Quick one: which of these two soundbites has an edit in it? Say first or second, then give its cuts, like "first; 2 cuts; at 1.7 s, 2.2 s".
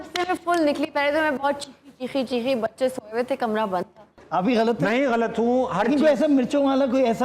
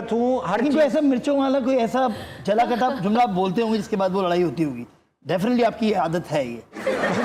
first; 1 cut; at 4.1 s